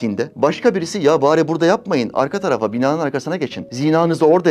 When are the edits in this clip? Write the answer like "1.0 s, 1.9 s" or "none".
none